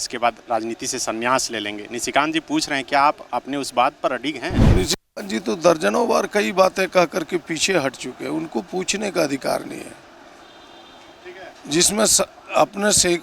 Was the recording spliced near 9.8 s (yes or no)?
no